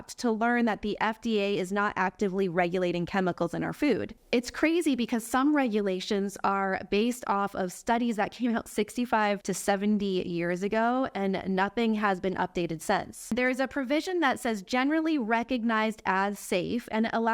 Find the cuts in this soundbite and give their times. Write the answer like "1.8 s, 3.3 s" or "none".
9.5 s, 13.3 s